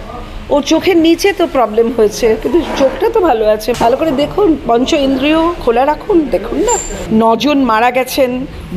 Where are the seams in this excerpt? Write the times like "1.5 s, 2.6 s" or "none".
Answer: 3.7 s, 6.9 s